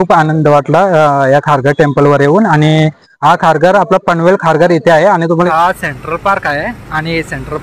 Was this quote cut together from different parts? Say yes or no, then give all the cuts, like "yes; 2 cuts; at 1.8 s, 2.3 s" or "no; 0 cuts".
yes; 1 cut; at 5.5 s